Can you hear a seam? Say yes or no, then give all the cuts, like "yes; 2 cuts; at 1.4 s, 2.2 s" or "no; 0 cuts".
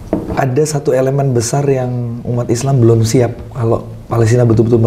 no; 0 cuts